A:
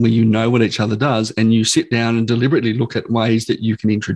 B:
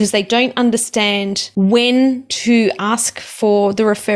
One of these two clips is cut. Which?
B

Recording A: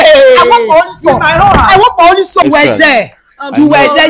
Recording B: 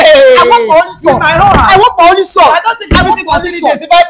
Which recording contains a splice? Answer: A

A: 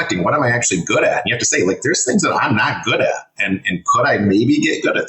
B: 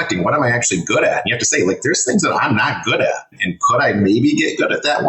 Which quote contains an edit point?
B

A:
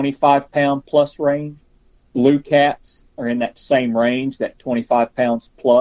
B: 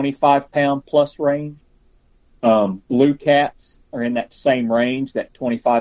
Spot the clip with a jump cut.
A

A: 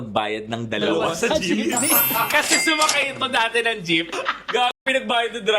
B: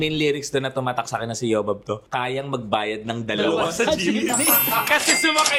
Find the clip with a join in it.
A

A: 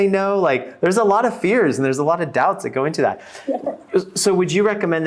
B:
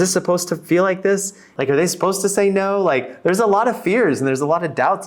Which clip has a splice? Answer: B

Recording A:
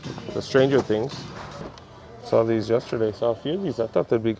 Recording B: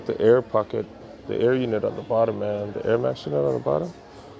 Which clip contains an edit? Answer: A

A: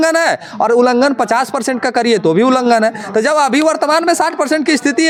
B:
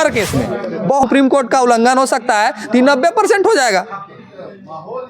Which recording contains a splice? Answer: B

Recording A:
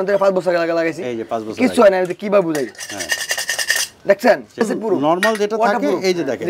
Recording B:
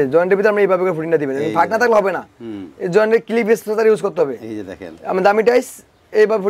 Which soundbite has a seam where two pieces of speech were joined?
A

